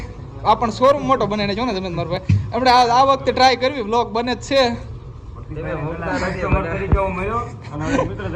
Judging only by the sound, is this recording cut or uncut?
uncut